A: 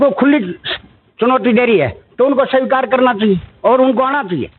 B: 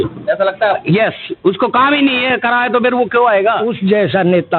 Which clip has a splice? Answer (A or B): B